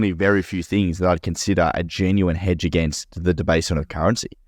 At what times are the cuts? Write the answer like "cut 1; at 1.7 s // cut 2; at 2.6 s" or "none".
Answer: cut 1; at 3.0 s